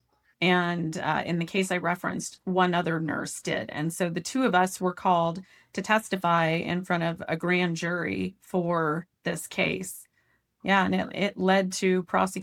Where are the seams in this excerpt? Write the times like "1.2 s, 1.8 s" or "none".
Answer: none